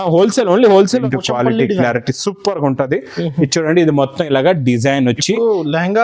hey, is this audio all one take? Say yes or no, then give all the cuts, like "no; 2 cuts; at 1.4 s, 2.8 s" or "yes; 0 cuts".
no; 1 cut; at 1.0 s